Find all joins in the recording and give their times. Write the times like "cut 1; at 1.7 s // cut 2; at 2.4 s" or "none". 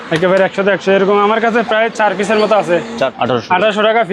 cut 1; at 3.1 s